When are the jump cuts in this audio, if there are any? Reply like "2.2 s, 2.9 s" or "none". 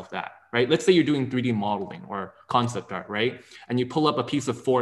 none